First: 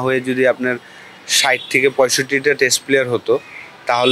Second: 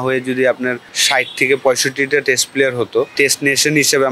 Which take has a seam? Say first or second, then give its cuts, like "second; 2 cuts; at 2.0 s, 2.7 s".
second; 2 cuts; at 0.9 s, 3.1 s